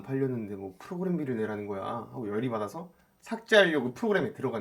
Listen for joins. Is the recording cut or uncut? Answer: uncut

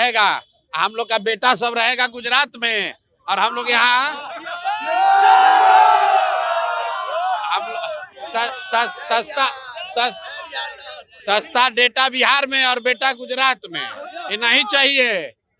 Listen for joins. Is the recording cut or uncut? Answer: uncut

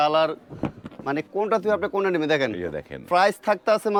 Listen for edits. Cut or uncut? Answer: uncut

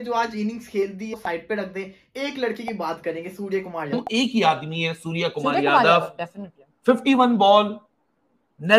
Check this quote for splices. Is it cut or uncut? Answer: cut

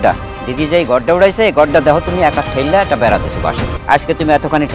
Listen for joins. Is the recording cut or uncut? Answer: cut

